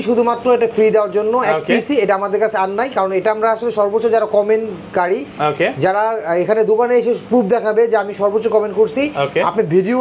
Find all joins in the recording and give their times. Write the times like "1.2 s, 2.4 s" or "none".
none